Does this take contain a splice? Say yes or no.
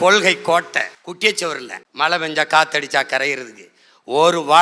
yes